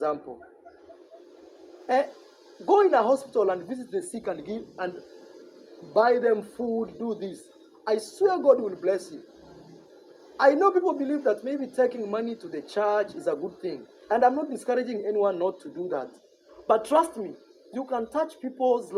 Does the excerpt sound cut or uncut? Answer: uncut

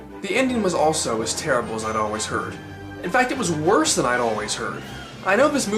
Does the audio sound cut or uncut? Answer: cut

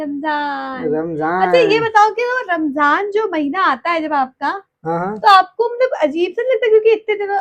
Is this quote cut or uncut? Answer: uncut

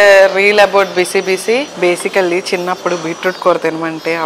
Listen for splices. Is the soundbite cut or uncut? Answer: cut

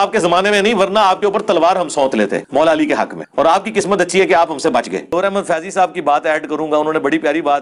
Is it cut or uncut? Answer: uncut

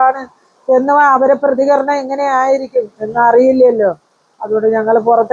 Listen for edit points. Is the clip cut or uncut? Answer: uncut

